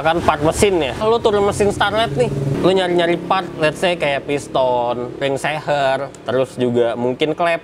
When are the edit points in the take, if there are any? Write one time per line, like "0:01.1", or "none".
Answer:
0:01.0
0:02.5
0:05.2